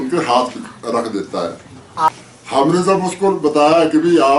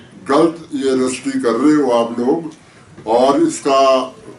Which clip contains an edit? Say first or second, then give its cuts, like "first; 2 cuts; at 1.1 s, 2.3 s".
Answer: first; 1 cut; at 2.1 s